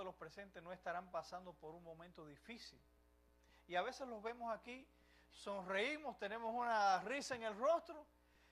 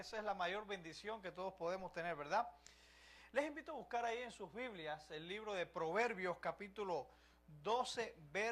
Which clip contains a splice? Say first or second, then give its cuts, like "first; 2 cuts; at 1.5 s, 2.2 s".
first; 1 cut; at 1.4 s